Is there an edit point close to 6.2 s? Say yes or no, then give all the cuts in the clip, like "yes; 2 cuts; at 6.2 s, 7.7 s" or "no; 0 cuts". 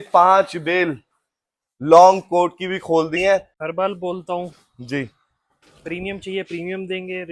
no; 1 cut; at 3.6 s